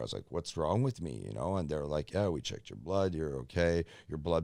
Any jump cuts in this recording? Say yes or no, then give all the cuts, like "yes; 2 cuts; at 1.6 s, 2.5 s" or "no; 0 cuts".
no; 0 cuts